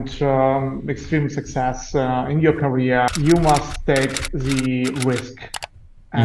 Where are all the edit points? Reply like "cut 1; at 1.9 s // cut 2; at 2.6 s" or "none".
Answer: cut 1; at 3.1 s